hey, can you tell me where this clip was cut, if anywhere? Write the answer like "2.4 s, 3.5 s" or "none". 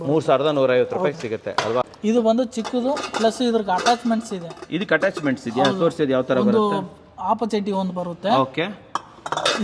2.0 s